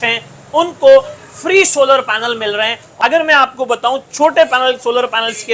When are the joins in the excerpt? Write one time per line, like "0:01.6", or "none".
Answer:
0:02.9